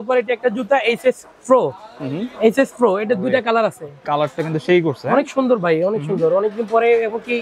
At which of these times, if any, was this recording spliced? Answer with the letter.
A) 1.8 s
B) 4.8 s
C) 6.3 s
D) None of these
D